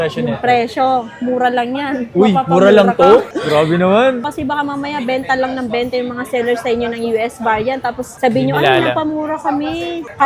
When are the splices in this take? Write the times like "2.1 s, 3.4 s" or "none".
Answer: 4.2 s